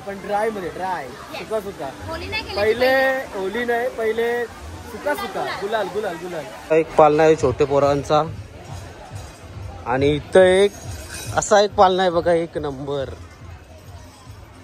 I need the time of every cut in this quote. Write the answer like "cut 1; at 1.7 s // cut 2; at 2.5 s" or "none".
cut 1; at 6.6 s